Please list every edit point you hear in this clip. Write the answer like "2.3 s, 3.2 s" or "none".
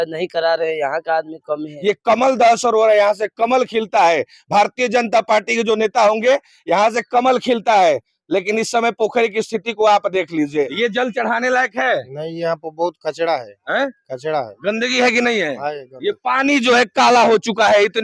1.7 s, 10.7 s